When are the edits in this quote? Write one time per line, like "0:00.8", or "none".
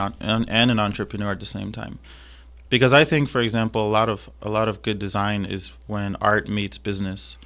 none